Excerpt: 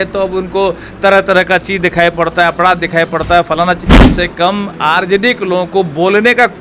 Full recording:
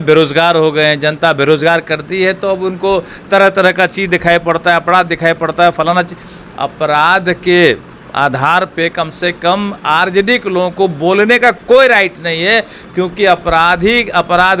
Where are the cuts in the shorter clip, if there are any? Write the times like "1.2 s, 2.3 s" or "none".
4.1 s